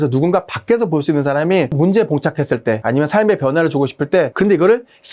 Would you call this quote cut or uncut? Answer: cut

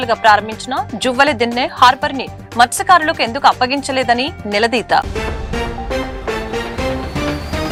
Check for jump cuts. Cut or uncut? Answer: uncut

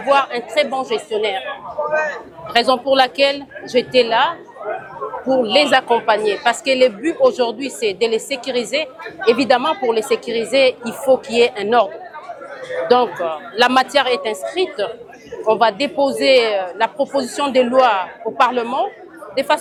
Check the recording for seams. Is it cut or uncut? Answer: uncut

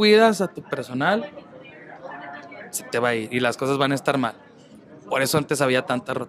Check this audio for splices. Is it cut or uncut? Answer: uncut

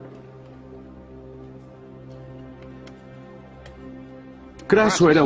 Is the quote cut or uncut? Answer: cut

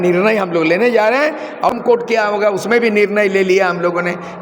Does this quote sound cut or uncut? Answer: cut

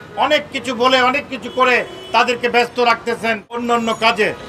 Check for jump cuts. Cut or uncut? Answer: cut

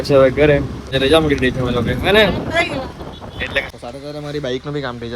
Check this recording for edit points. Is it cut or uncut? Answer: cut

